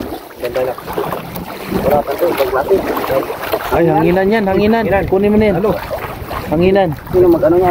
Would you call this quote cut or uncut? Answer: uncut